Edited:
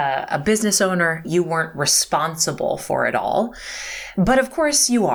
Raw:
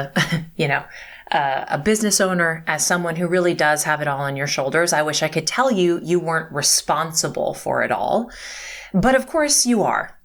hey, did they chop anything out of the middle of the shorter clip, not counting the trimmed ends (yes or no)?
yes